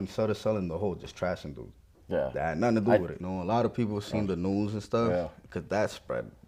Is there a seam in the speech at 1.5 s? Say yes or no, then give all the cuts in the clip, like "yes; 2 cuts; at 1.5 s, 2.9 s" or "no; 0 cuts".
no; 1 cut; at 3.2 s